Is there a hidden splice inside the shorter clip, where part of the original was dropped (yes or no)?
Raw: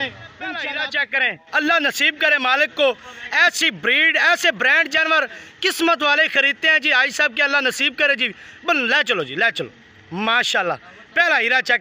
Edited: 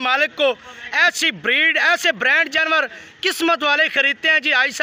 no